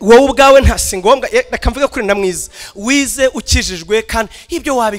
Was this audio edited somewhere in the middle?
no; 0 cuts

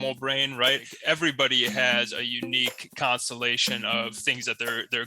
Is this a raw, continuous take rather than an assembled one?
no; 1 cut; at 0.9 s

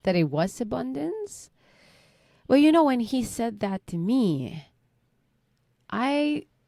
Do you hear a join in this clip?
no; 0 cuts

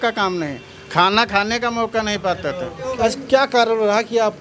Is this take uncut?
no; 1 cut; at 2.8 s

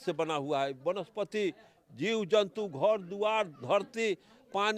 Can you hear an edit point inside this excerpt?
no; 0 cuts

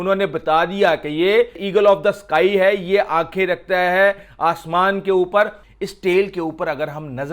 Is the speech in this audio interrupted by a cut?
yes; 2 cuts; at 1.6 s, 5.6 s

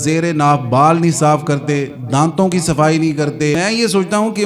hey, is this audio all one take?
no; 1 cut; at 3.6 s

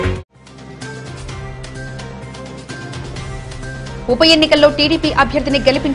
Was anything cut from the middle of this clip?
yes; 1 cut; at 3.9 s

